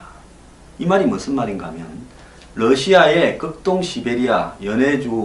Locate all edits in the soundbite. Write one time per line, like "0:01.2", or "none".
0:01.0